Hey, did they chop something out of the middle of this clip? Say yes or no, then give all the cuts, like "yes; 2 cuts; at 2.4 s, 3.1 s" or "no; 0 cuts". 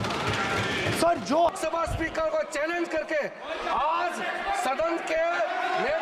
yes; 1 cut; at 1.5 s